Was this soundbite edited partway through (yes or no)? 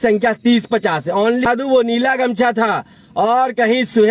yes